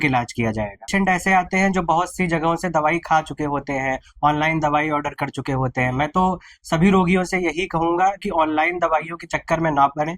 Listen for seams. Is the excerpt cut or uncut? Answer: cut